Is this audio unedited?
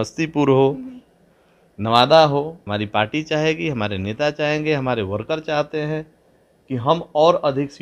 no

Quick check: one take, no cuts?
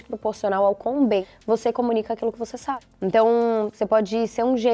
no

